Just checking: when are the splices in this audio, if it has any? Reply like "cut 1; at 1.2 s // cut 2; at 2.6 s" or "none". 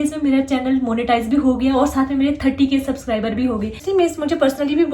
cut 1; at 3.8 s